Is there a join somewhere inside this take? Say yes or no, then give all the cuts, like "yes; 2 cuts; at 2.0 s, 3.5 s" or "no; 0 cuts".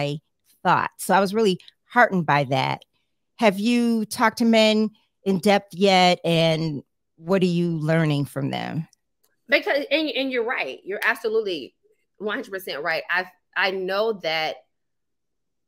no; 0 cuts